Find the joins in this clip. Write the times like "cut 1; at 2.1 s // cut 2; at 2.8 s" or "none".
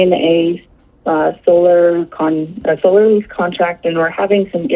none